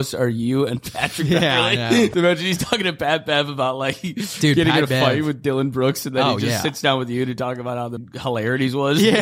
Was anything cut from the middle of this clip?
yes; 2 cuts; at 2.1 s, 8.1 s

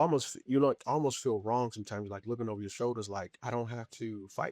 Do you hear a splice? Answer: yes; 1 cut; at 3.4 s

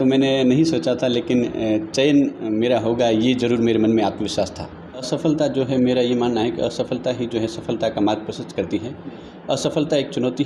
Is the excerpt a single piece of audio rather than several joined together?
no; 1 cut; at 5.1 s

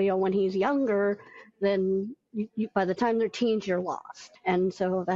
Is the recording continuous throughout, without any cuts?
yes; 0 cuts

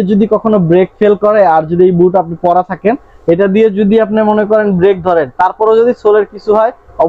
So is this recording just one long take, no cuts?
yes; 0 cuts

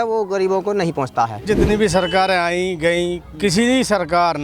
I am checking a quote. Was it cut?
yes; 1 cut; at 1.4 s

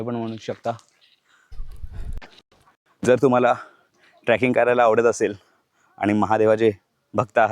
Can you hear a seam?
yes; 1 cut; at 1.5 s

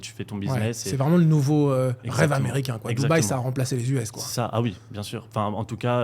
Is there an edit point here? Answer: no; 0 cuts

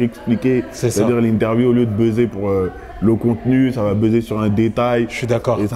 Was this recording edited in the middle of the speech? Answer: no; 0 cuts

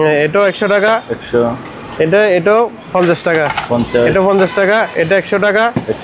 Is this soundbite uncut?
yes; 0 cuts

